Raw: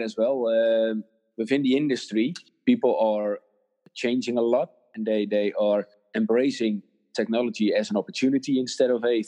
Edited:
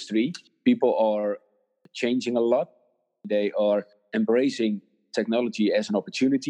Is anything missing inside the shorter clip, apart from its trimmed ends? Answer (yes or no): no